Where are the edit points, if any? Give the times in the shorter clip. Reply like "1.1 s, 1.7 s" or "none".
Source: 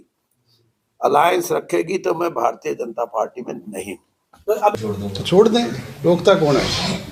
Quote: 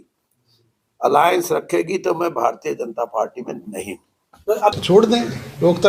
4.8 s

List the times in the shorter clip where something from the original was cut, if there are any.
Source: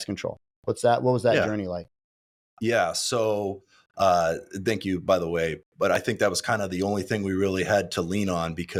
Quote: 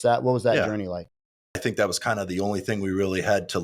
1.6 s

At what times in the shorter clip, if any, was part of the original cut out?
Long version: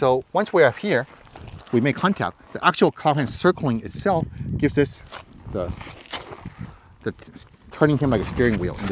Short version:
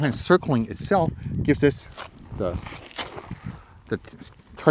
none

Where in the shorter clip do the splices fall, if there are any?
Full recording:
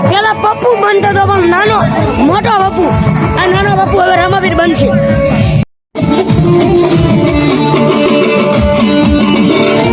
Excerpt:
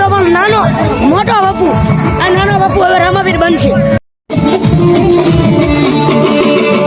4.0 s

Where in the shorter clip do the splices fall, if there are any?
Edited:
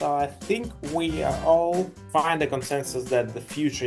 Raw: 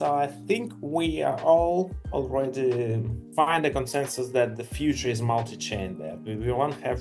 2.0 s

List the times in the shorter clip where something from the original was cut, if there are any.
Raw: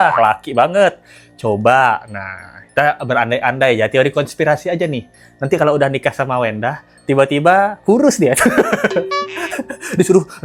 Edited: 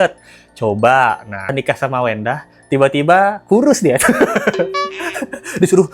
1.5 s

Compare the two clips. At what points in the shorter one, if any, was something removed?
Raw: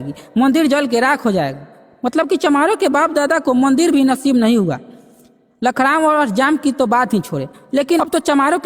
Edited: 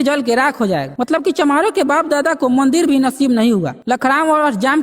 0.9 s, 3.7 s

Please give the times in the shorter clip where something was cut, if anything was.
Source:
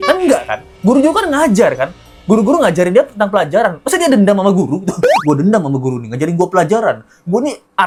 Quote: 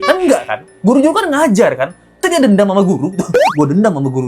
2.1 s

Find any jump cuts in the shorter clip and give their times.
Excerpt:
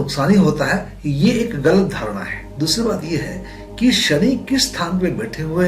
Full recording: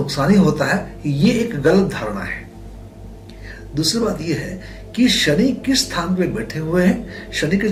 2.4 s

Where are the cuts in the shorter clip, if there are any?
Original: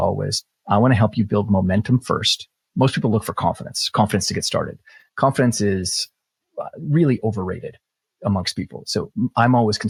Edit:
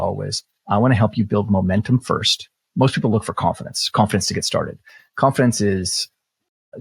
none

